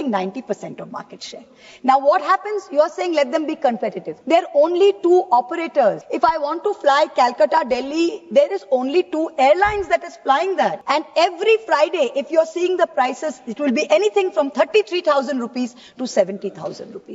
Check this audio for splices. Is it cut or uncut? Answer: cut